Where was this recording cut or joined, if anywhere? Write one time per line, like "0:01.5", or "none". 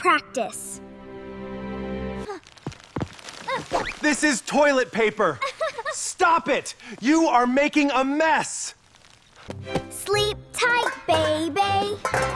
0:02.2
0:09.4